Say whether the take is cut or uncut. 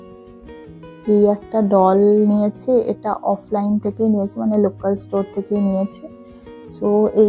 uncut